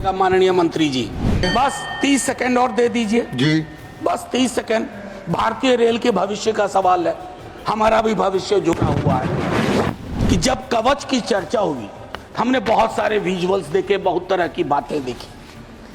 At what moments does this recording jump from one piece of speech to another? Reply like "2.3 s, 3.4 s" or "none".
1.4 s, 10.1 s